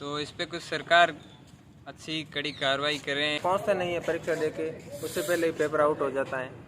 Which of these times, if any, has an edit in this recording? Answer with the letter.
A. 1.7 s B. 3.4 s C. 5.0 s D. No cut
B